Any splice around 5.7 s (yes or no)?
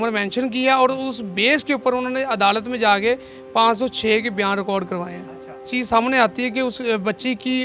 yes